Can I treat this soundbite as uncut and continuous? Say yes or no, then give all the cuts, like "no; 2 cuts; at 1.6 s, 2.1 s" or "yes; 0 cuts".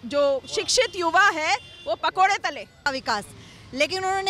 no; 1 cut; at 2.9 s